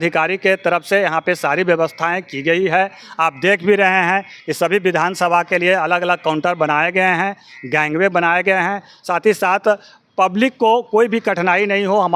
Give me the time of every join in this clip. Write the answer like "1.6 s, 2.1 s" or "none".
none

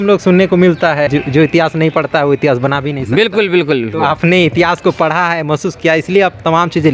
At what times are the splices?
1.1 s

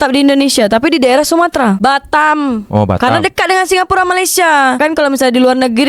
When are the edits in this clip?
1.8 s, 4.8 s

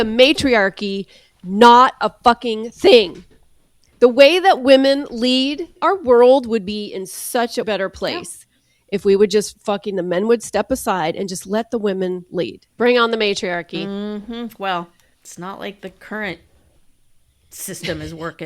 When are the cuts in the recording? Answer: 5.7 s, 7.7 s, 12.6 s

